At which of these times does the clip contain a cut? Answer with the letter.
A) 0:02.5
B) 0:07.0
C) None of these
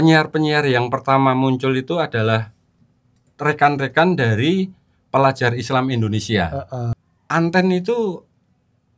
B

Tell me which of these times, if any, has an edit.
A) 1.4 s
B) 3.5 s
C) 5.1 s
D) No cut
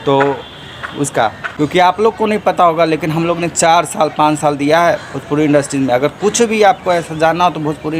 A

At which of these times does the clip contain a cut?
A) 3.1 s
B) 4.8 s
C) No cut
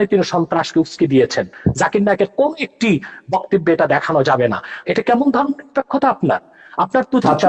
B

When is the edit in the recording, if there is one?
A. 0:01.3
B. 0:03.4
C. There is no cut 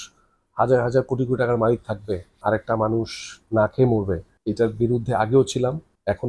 C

